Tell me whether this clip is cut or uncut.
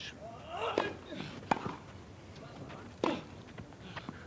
uncut